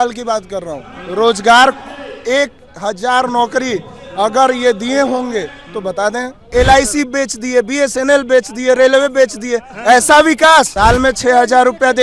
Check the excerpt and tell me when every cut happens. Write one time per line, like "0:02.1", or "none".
0:06.4
0:10.7